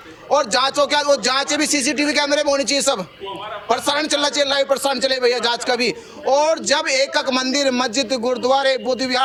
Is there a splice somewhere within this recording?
no; 0 cuts

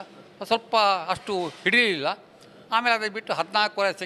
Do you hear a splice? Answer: no; 0 cuts

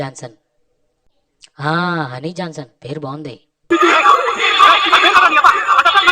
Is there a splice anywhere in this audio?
yes; 1 cut; at 3.5 s

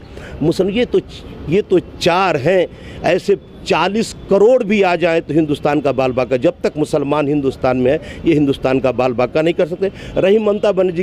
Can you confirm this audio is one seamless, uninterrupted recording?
yes; 0 cuts

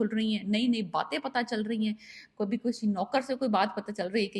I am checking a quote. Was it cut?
no; 0 cuts

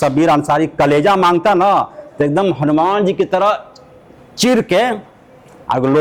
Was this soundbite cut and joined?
no; 0 cuts

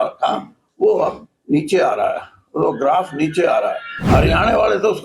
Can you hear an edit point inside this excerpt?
yes; 1 cut; at 3.9 s

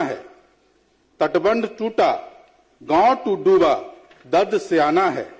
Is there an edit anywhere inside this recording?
no; 0 cuts

